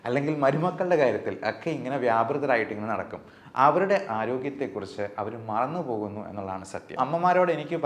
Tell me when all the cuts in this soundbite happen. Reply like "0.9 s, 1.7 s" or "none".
7.0 s